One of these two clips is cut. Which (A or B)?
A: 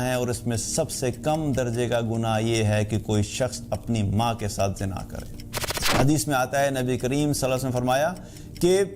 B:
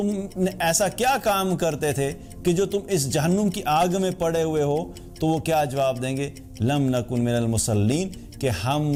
A